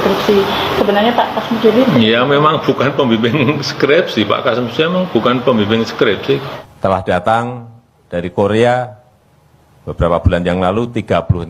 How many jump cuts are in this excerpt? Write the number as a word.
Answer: one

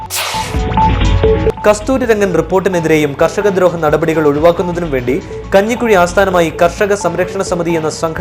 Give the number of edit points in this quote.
one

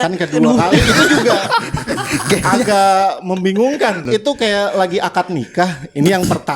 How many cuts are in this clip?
one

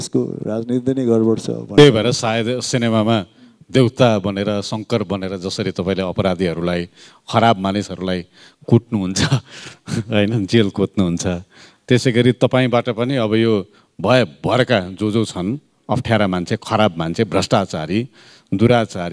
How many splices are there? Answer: one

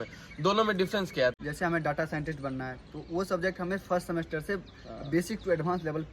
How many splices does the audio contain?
one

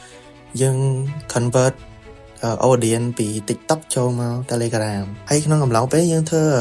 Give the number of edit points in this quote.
one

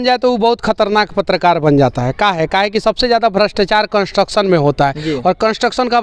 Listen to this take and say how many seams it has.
zero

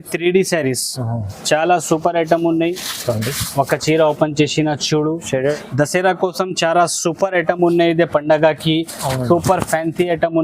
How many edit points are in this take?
one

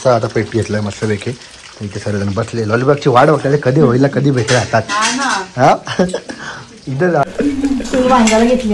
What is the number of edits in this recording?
one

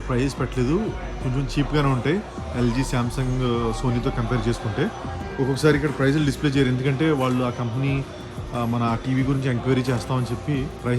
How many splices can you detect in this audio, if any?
zero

